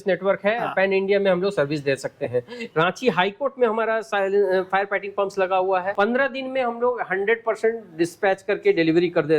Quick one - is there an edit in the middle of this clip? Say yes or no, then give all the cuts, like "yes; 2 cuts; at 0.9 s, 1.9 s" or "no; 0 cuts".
yes; 2 cuts; at 2.6 s, 5.9 s